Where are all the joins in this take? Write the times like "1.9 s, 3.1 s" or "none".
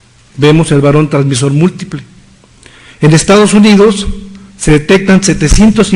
4.9 s